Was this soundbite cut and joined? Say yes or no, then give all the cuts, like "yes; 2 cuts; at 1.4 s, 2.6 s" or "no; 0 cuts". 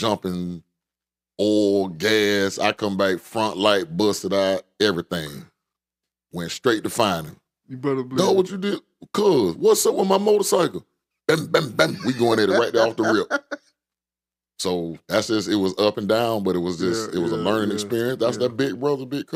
no; 0 cuts